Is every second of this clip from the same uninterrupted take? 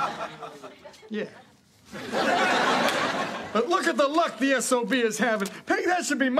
yes; 0 cuts

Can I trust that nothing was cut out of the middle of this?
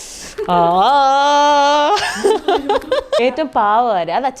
no; 1 cut; at 3.2 s

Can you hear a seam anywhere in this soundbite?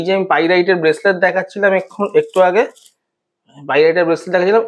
no; 0 cuts

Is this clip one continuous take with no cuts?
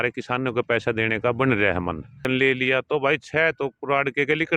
no; 1 cut; at 2.2 s

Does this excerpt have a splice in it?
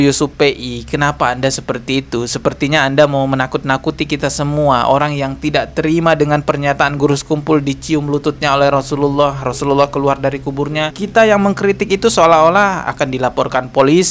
no; 0 cuts

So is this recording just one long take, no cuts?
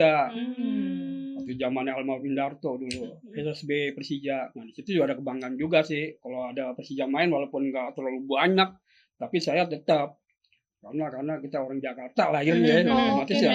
yes; 0 cuts

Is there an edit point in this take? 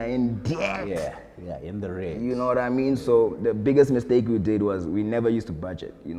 no; 0 cuts

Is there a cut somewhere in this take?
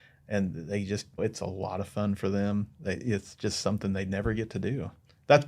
yes; 1 cut; at 1.2 s

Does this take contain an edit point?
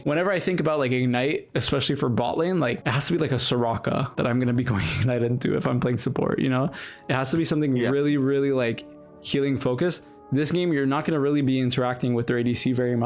no; 0 cuts

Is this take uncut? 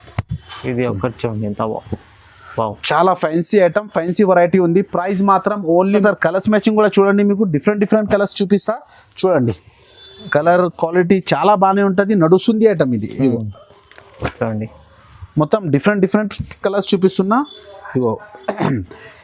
no; 1 cut; at 6.0 s

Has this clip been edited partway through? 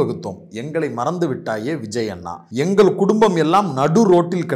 yes; 1 cut; at 2.4 s

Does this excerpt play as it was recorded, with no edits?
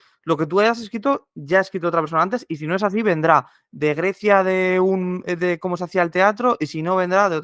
yes; 0 cuts

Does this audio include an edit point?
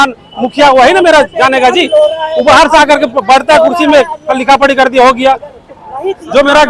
no; 0 cuts

